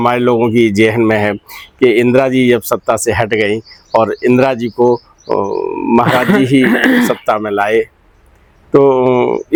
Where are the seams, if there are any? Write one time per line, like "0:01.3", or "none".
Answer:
none